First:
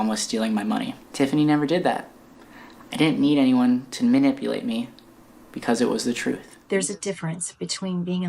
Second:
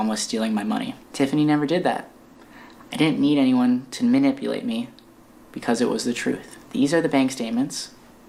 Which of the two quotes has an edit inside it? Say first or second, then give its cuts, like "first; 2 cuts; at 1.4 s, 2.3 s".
first; 1 cut; at 6.5 s